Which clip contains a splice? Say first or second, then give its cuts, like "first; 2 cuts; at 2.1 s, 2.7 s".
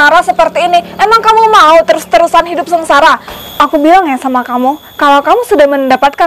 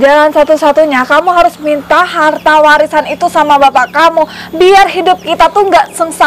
first; 1 cut; at 3.3 s